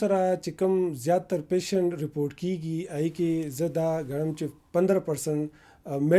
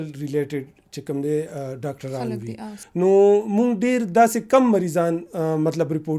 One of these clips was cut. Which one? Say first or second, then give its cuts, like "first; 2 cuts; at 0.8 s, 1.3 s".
second; 1 cut; at 2.7 s